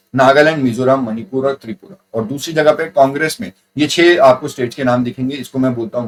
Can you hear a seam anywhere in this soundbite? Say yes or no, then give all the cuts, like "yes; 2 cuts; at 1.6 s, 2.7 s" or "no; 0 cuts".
no; 0 cuts